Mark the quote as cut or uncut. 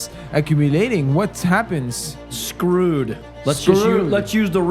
cut